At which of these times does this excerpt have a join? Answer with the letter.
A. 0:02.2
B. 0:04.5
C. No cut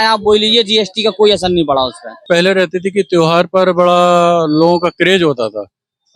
A